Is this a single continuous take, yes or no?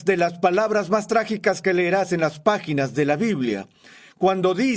yes